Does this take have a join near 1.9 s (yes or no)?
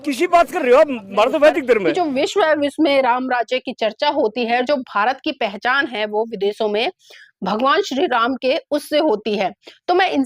yes